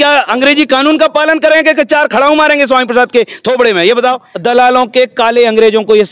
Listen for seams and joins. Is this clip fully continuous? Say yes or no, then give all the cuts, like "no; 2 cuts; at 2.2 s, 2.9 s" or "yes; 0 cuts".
no; 1 cut; at 4.3 s